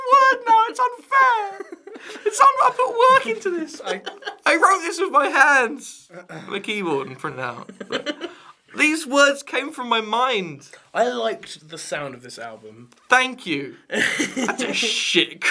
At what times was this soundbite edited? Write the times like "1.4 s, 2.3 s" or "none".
4.6 s